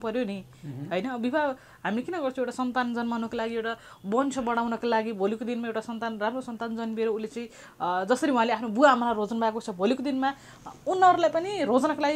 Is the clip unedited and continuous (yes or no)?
yes